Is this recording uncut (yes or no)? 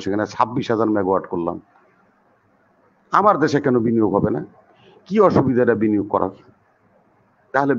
yes